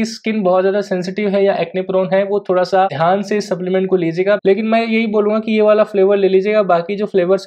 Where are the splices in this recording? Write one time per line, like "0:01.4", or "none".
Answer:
0:02.9
0:04.4